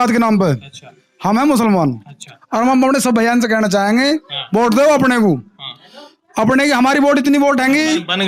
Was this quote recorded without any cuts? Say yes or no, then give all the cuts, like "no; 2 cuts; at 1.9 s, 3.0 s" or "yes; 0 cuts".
yes; 0 cuts